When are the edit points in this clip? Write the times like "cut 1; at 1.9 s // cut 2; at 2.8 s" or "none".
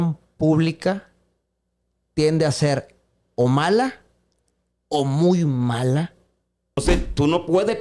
cut 1; at 6.8 s

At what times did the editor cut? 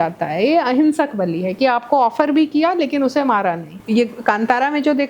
cut 1; at 3.7 s

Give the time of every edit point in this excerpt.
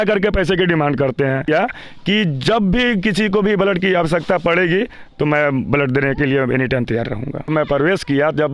cut 1; at 1.5 s // cut 2; at 7.5 s

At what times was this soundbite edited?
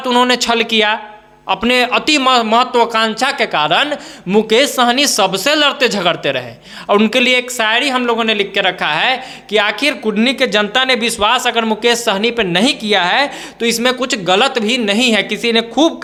none

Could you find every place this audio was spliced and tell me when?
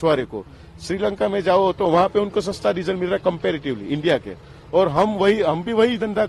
none

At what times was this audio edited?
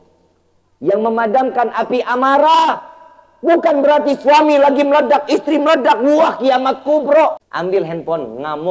cut 1; at 7.5 s

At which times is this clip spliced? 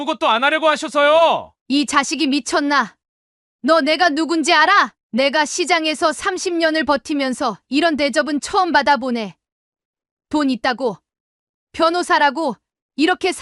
cut 1; at 1.5 s // cut 2; at 5.0 s

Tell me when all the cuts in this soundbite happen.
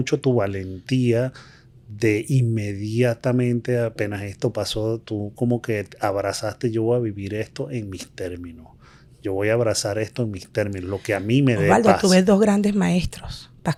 none

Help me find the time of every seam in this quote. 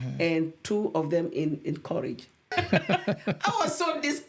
cut 1; at 2.5 s

